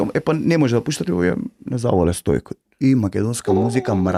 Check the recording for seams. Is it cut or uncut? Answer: uncut